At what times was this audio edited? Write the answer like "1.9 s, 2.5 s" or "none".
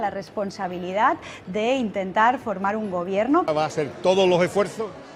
none